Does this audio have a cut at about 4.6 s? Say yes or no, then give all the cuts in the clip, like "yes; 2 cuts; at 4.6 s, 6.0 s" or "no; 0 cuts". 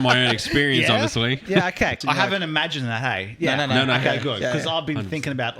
no; 1 cut; at 2.0 s